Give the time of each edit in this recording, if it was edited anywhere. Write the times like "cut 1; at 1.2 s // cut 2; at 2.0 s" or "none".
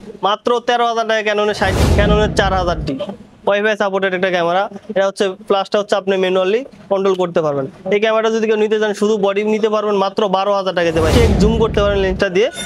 cut 1; at 1.7 s // cut 2; at 11.1 s

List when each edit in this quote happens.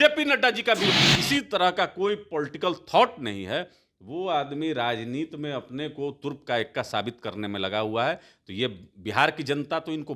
cut 1; at 0.9 s

